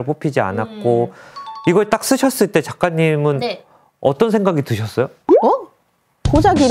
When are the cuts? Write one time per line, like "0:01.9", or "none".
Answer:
0:05.4